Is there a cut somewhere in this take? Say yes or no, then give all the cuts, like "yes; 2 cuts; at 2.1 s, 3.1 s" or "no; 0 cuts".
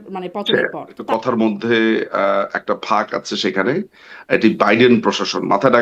yes; 1 cut; at 1.0 s